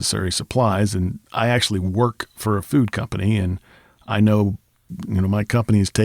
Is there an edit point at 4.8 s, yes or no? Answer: yes